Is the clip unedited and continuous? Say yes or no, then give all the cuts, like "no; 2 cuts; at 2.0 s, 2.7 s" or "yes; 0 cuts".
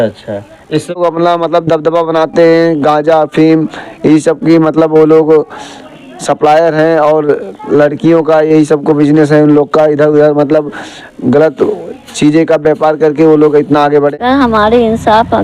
no; 2 cuts; at 1.0 s, 14.1 s